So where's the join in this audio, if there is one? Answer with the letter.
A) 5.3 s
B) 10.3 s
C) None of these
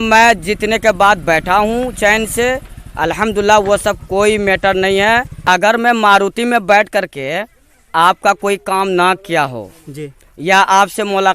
A